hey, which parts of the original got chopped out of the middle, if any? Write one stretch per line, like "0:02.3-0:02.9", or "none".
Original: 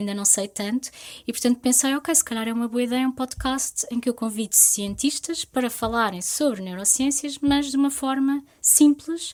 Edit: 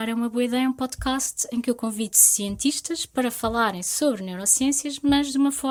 none